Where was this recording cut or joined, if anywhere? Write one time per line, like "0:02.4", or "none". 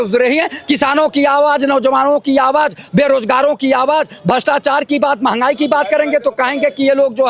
none